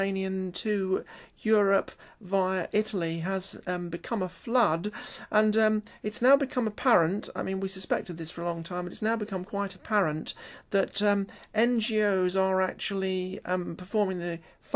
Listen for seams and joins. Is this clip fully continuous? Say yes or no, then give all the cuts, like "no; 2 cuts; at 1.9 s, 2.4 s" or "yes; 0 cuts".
no; 1 cut; at 5.4 s